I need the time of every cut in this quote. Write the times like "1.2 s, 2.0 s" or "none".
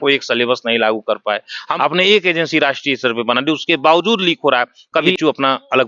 1.7 s, 5.1 s